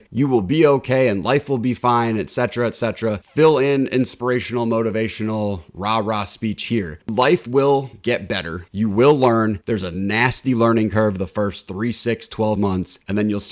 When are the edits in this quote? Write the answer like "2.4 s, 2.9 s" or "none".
7.0 s